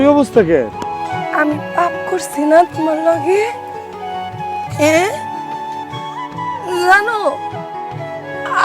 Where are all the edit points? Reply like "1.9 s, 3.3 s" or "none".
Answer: none